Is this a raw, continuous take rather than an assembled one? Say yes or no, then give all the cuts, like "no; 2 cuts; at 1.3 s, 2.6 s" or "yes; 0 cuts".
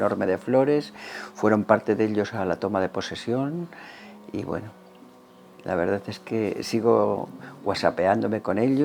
yes; 0 cuts